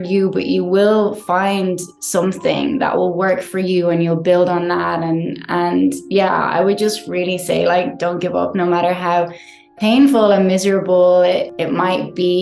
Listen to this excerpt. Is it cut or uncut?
uncut